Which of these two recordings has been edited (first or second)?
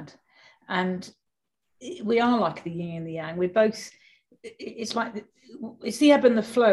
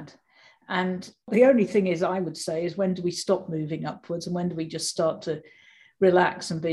second